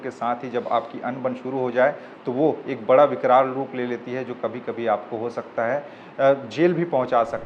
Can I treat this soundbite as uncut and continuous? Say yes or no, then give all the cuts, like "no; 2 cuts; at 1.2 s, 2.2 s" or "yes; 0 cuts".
yes; 0 cuts